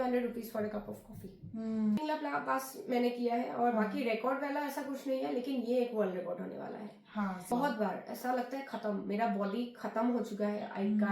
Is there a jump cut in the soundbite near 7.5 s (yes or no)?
yes